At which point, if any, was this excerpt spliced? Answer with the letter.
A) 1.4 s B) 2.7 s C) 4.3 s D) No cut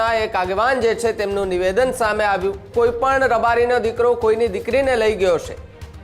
B